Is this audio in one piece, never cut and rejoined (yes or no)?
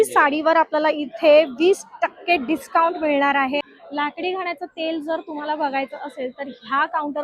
no